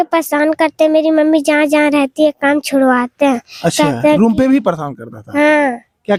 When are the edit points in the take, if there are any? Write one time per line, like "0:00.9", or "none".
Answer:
none